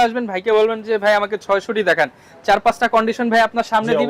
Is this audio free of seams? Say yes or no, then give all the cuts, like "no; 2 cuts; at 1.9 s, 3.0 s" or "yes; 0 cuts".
yes; 0 cuts